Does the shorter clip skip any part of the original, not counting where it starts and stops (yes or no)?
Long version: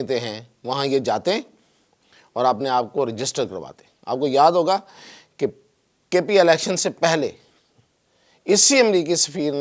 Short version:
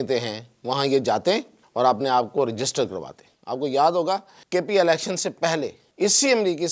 yes